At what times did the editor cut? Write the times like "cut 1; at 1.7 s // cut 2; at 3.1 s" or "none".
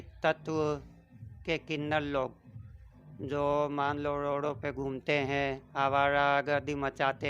none